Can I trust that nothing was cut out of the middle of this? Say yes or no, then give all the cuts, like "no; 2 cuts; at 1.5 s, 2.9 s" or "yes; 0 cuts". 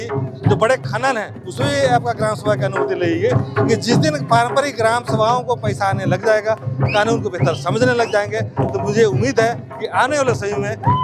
yes; 0 cuts